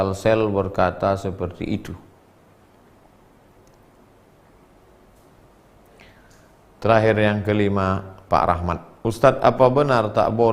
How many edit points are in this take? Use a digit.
1